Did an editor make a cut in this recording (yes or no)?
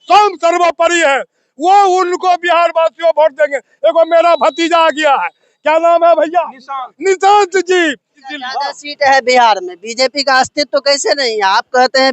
yes